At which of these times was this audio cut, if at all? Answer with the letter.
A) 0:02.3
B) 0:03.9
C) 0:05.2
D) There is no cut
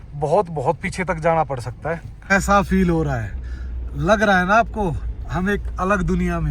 A